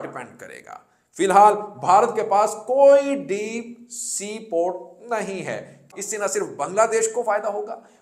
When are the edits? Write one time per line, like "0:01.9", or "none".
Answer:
0:05.9